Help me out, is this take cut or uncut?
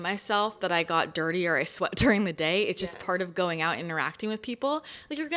uncut